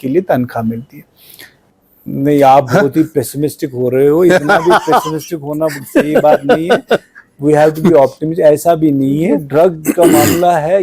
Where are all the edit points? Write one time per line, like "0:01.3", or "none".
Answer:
0:01.3
0:09.3

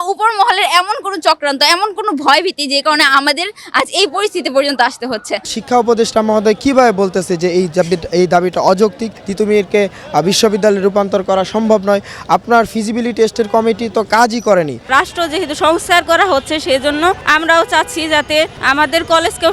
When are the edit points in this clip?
0:05.5
0:09.2
0:14.9
0:17.2
0:18.6

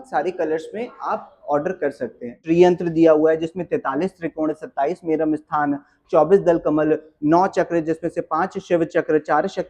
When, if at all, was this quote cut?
0:02.4

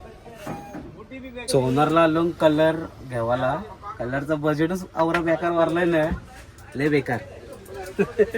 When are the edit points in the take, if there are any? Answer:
0:01.5

